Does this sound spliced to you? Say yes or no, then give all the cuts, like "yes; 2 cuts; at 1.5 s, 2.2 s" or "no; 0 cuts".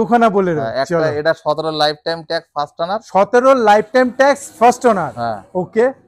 no; 0 cuts